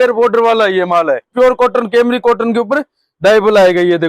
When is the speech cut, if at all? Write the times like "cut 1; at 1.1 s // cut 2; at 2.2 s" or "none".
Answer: cut 1; at 1.3 s